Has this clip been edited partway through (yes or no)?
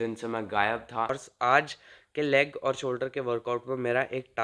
yes